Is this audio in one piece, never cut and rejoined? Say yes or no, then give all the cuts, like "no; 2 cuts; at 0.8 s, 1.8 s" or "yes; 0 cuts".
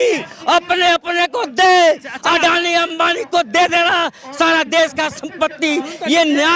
yes; 0 cuts